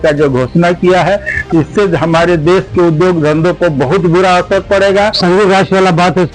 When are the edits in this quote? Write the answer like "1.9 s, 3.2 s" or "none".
5.2 s